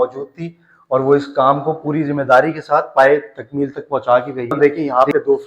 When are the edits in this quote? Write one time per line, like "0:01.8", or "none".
0:04.5